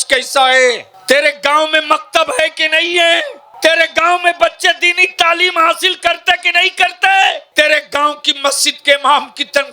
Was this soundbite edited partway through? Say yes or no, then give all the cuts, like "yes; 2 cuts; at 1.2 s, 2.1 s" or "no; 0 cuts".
yes; 3 cuts; at 0.9 s, 3.4 s, 7.4 s